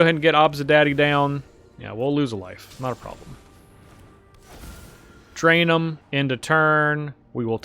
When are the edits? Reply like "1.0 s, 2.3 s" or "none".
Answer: 6.0 s